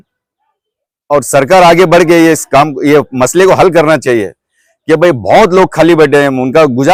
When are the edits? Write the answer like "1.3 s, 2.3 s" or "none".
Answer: none